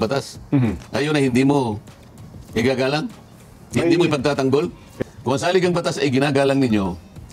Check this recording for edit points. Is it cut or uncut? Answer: cut